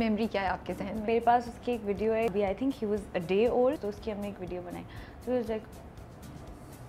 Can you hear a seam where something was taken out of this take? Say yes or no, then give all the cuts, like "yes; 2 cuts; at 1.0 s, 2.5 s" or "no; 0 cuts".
yes; 3 cuts; at 1.1 s, 2.3 s, 3.9 s